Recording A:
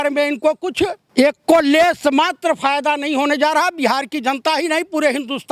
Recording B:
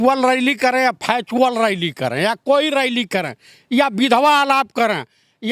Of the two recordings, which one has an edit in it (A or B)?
A